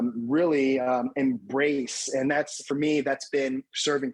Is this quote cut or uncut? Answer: uncut